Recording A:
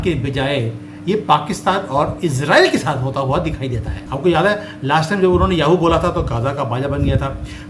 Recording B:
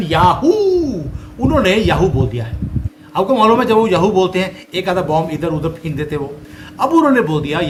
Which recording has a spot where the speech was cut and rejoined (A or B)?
A